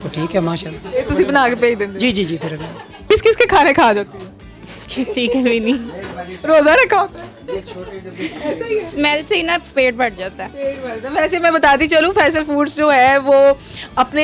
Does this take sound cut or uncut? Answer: cut